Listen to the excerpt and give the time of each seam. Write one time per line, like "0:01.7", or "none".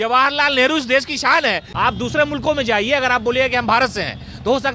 0:01.7